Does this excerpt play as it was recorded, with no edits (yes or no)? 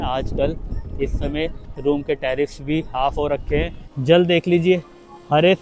no